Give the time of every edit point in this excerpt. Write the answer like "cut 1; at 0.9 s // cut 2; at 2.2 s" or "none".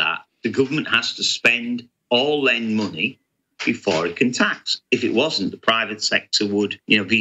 none